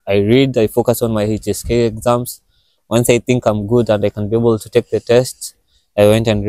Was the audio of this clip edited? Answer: no; 0 cuts

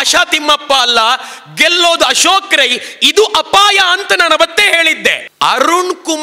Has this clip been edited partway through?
yes; 1 cut; at 5.2 s

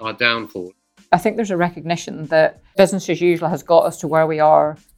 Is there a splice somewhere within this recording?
yes; 2 cuts; at 1.1 s, 2.6 s

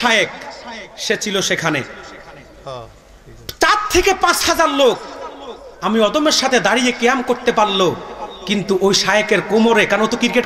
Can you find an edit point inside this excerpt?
no; 0 cuts

